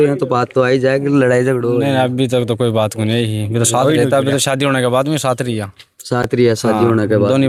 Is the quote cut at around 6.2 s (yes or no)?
no